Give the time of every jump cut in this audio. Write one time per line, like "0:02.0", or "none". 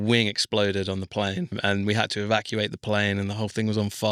0:01.6